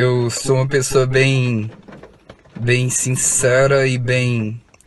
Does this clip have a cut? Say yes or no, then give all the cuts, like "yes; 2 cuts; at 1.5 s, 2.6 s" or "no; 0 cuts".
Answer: no; 0 cuts